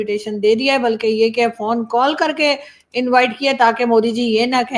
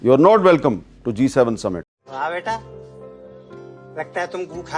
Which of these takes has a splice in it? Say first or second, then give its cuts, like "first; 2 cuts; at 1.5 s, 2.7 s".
second; 1 cut; at 2.0 s